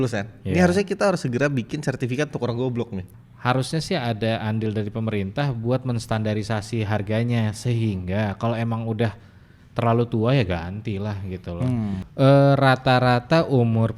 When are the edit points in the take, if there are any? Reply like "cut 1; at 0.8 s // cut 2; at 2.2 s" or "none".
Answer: cut 1; at 3.0 s // cut 2; at 12.1 s

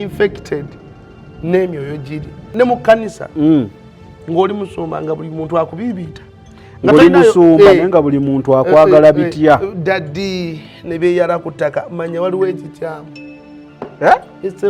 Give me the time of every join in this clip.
cut 1; at 2.5 s

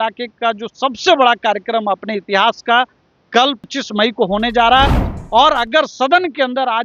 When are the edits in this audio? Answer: cut 1; at 3.7 s // cut 2; at 5.0 s

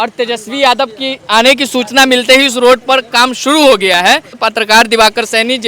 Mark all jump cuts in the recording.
cut 1; at 4.4 s

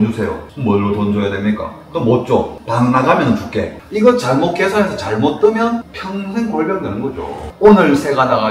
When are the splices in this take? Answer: cut 1; at 3.8 s // cut 2; at 7.5 s

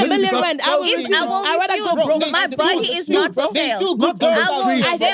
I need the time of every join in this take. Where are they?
none

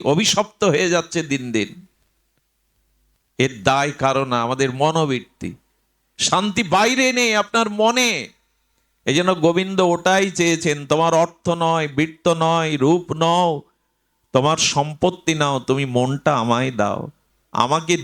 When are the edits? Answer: none

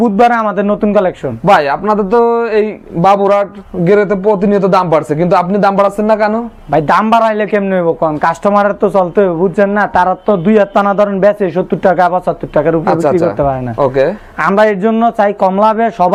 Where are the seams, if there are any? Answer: none

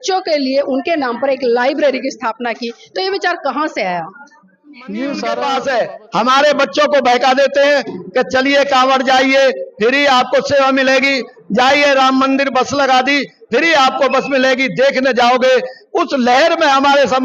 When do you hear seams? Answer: cut 1; at 5.4 s

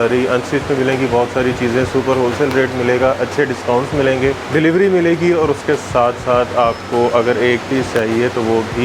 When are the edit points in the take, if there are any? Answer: cut 1; at 4.4 s

